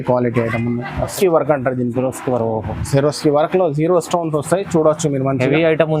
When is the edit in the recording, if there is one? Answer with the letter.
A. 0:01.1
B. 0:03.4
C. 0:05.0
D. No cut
A